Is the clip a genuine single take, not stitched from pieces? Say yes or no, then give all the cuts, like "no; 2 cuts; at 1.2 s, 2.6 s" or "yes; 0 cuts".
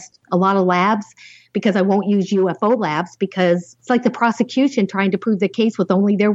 no; 1 cut; at 3.7 s